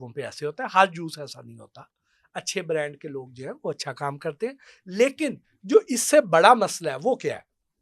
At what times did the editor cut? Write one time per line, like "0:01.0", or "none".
none